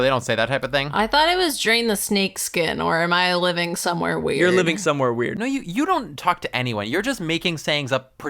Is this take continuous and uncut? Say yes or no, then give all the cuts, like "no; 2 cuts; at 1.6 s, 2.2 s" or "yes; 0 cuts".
no; 1 cut; at 5.3 s